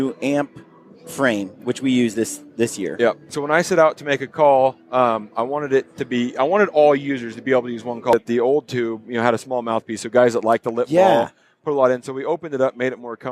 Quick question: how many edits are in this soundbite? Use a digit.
2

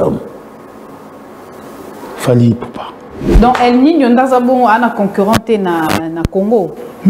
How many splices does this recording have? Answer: 1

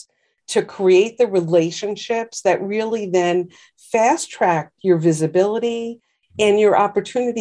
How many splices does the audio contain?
0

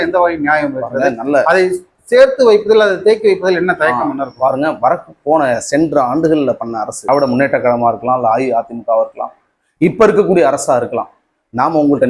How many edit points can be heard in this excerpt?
0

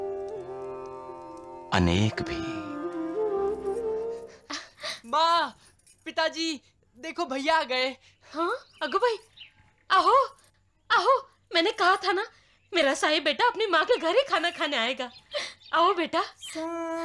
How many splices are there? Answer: 1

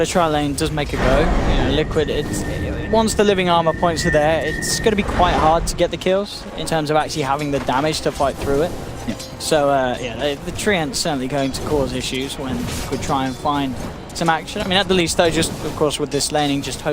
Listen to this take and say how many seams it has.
1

